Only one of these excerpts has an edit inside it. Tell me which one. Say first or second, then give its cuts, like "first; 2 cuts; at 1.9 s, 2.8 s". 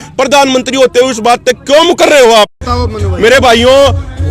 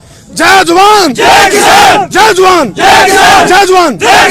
first; 1 cut; at 2.6 s